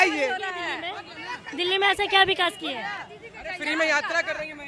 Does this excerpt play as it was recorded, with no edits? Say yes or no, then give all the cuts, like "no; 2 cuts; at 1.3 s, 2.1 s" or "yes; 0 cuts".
yes; 0 cuts